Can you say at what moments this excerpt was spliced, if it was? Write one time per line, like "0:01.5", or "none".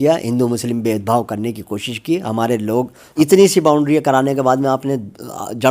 0:03.0